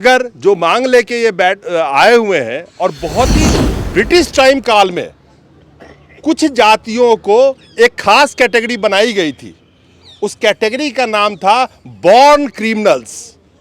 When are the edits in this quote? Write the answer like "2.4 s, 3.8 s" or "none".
3.6 s